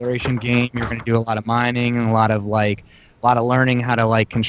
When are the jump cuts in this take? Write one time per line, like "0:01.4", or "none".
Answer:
0:03.4